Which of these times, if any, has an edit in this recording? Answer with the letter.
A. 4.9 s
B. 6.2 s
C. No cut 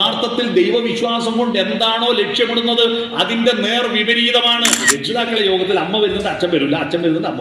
A